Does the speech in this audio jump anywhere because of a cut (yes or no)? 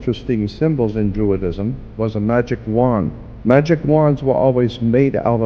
yes